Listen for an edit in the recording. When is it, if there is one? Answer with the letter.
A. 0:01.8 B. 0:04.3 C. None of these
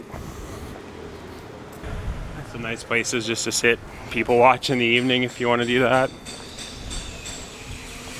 A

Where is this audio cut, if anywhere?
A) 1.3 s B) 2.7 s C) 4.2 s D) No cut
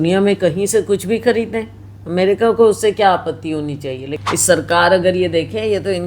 C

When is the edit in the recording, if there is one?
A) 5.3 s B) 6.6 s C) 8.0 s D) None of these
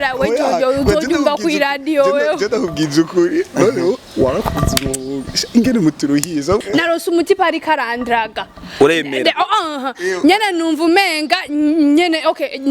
B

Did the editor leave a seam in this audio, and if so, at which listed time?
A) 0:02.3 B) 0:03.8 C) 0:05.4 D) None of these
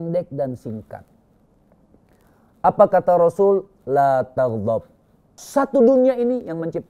C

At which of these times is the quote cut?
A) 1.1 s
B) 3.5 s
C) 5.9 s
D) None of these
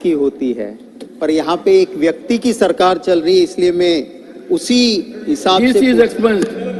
D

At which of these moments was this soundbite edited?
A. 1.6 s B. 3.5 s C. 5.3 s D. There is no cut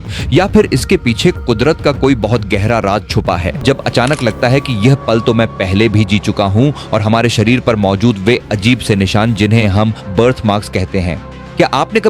B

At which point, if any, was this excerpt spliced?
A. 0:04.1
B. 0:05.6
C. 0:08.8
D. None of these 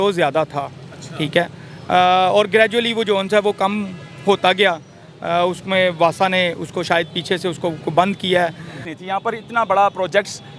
C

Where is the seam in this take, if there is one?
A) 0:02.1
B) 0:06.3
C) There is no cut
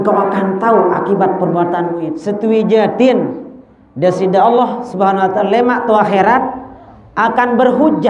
A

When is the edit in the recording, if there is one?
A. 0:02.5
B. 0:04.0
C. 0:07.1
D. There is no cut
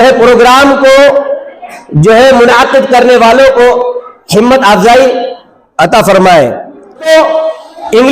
C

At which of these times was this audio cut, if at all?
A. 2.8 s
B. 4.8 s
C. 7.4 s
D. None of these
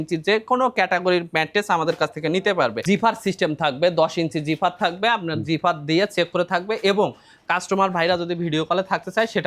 A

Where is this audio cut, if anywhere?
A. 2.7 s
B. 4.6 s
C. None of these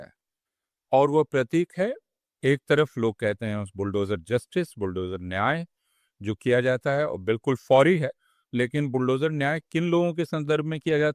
C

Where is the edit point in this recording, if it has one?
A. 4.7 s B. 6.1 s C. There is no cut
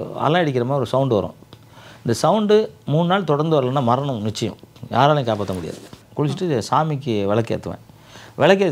B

